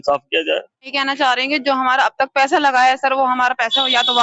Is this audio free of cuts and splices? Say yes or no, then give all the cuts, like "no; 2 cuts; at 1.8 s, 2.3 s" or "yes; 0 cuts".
no; 1 cut; at 0.9 s